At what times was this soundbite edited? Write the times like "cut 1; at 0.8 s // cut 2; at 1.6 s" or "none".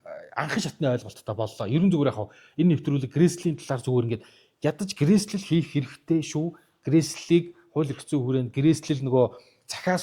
none